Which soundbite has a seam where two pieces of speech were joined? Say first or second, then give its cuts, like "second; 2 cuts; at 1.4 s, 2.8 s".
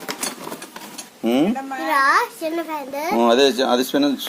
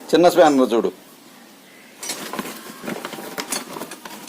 second; 1 cut; at 2.1 s